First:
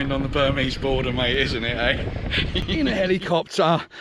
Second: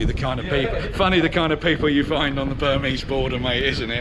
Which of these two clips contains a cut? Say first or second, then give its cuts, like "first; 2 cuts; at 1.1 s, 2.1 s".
first; 1 cut; at 2.6 s